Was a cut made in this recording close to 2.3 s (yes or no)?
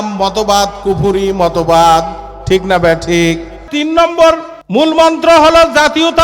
no